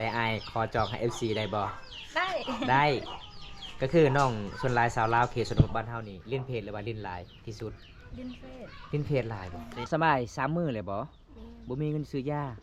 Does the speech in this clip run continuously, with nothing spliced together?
no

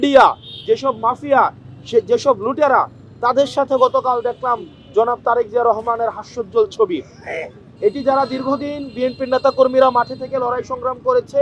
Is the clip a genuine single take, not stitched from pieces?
yes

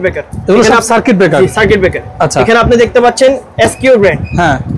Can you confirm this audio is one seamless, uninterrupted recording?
yes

